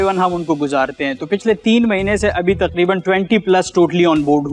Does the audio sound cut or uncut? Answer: uncut